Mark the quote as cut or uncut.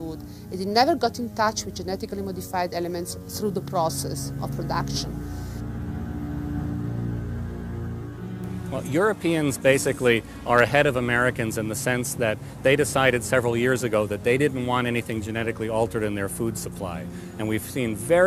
cut